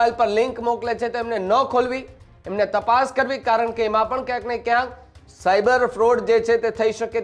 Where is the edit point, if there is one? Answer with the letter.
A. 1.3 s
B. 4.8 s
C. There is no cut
C